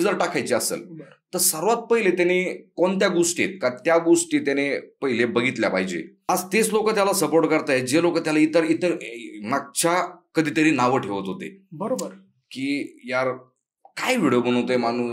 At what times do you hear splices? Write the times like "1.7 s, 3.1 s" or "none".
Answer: 6.1 s